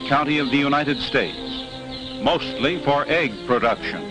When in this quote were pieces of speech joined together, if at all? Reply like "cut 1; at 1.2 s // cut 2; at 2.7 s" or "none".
cut 1; at 1.8 s